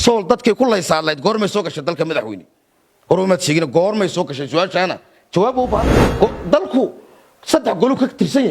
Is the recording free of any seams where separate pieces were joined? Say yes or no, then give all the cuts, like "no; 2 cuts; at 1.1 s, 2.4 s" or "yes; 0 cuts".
no; 1 cut; at 6.0 s